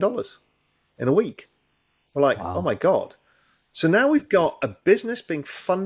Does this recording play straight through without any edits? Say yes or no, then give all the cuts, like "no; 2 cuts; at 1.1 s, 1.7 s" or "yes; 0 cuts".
yes; 0 cuts